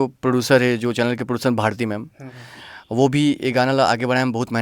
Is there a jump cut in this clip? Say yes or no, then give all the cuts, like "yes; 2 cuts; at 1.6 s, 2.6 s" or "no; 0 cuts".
no; 0 cuts